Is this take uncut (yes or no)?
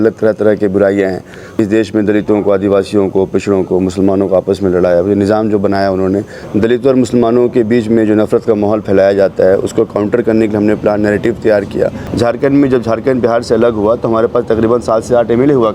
no